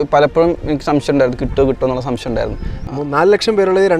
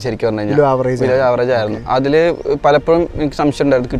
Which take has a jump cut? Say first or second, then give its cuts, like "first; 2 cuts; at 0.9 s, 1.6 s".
first; 1 cut; at 2.7 s